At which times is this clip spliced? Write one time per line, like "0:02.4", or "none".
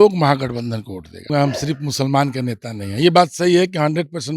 0:01.3